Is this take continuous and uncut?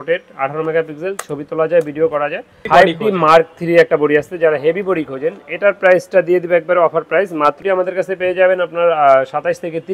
no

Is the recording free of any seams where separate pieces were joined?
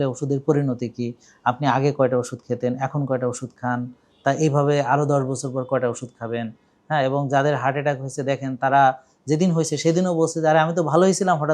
yes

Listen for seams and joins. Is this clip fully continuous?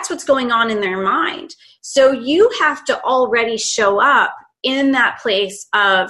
yes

